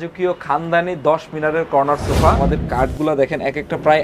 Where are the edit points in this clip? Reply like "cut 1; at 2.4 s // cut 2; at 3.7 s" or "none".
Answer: cut 1; at 2.4 s